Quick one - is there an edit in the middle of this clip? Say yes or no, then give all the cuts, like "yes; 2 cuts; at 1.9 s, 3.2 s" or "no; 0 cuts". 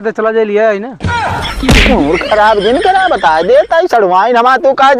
no; 0 cuts